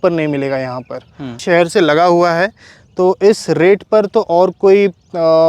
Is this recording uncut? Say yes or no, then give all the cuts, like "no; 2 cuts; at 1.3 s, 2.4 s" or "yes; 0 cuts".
no; 1 cut; at 1.3 s